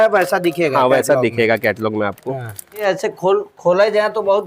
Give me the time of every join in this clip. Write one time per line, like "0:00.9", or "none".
0:02.8